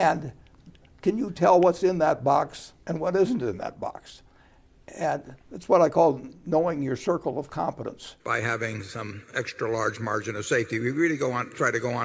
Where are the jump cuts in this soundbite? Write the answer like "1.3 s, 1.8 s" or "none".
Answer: 8.1 s